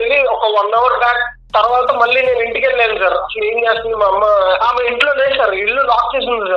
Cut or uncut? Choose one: cut